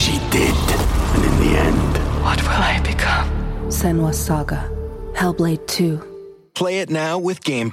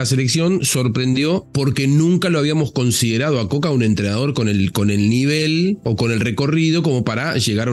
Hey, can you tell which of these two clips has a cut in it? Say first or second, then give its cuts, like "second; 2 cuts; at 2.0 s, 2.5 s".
second; 1 cut; at 1.5 s